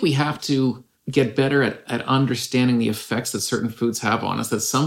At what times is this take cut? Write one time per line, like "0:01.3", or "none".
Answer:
0:00.9